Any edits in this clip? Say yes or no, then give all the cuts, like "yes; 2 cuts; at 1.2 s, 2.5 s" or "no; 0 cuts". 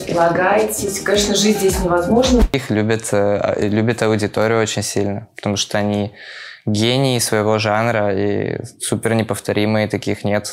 yes; 1 cut; at 2.5 s